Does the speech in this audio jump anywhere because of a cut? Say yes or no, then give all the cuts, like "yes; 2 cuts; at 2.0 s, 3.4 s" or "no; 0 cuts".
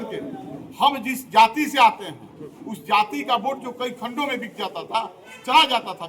no; 0 cuts